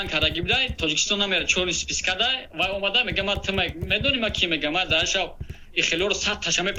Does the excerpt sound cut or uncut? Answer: uncut